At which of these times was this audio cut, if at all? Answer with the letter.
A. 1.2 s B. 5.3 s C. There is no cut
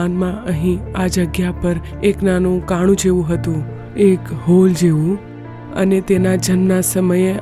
C